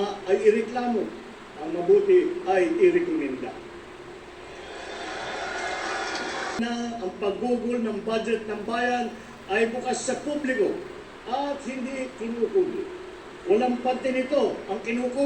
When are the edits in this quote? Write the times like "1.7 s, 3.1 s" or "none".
6.6 s